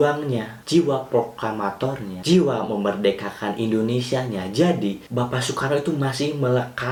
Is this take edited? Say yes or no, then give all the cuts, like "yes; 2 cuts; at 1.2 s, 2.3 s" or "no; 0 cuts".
no; 0 cuts